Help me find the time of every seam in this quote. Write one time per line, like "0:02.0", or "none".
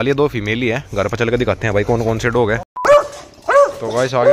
0:02.9